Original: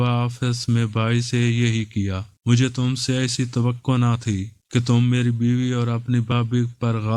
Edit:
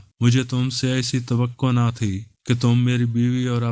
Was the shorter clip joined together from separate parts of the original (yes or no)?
no